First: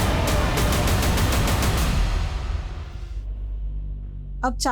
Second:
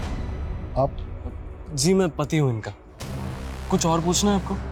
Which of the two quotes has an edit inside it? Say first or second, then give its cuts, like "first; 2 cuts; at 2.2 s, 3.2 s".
first; 1 cut; at 3.0 s